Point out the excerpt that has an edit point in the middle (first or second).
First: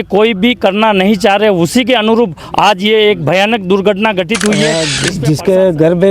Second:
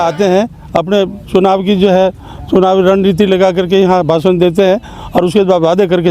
first